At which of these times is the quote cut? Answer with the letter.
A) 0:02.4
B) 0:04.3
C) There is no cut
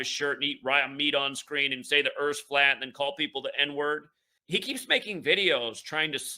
B